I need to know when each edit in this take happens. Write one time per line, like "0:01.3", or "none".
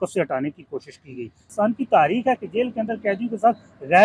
0:01.5